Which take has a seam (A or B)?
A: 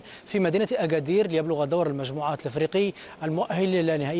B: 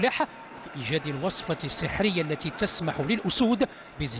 B